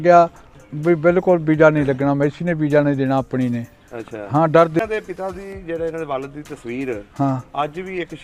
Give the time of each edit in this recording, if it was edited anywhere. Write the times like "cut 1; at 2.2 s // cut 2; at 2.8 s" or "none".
cut 1; at 4.8 s